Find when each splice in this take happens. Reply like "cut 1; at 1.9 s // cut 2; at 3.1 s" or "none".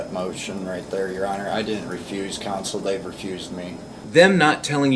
cut 1; at 3.9 s

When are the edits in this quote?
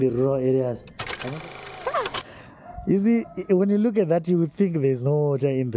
cut 1; at 1.2 s

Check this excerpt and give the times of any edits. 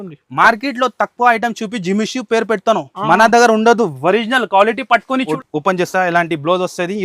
cut 1; at 5.3 s

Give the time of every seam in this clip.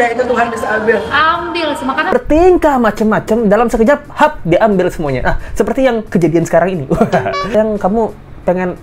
cut 1; at 2.1 s // cut 2; at 7.5 s

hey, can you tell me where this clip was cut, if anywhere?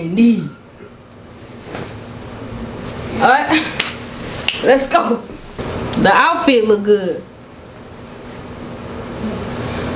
cut 1; at 5.4 s

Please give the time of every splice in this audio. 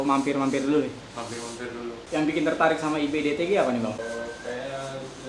cut 1; at 2.0 s

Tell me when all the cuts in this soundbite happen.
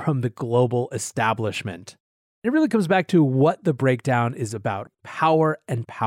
cut 1; at 2.5 s // cut 2; at 4.9 s

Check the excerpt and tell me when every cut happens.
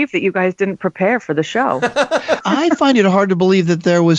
cut 1; at 2.4 s

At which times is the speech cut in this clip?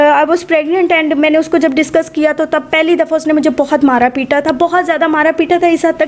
none

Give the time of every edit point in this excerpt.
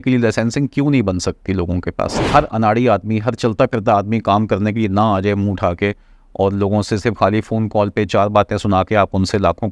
cut 1; at 2.1 s

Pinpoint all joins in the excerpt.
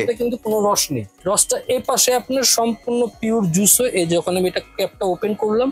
cut 1; at 1.2 s

